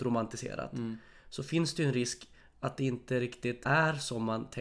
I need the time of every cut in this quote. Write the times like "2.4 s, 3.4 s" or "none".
3.6 s